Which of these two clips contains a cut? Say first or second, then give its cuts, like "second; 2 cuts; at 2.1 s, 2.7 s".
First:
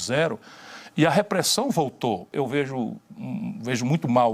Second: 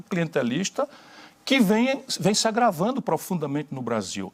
first; 1 cut; at 2.3 s